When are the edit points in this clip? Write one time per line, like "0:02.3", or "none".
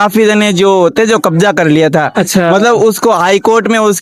none